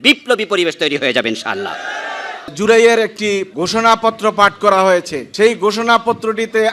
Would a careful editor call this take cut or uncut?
cut